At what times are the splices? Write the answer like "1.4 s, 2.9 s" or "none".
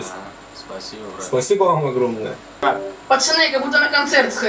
2.6 s